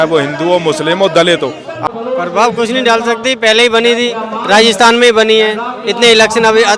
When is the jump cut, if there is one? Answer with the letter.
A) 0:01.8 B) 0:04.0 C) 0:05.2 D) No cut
A